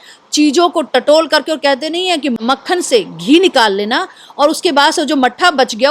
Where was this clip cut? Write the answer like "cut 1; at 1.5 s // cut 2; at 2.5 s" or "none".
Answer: cut 1; at 2.4 s